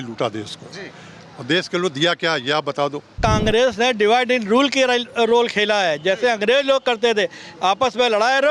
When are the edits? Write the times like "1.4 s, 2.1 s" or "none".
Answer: 3.2 s